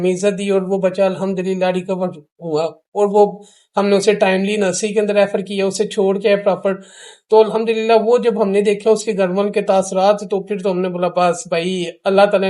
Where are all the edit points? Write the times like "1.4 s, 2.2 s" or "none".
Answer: none